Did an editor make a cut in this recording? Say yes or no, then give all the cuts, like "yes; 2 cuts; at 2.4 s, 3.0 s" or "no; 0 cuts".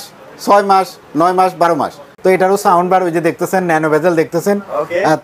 yes; 1 cut; at 2.0 s